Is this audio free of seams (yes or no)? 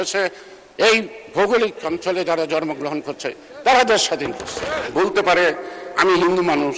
no